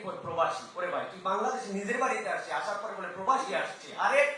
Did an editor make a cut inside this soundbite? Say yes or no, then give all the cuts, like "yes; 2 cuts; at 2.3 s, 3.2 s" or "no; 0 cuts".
no; 0 cuts